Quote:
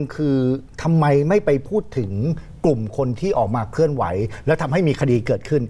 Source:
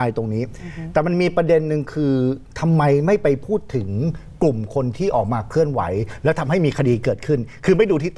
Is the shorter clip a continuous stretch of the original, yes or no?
yes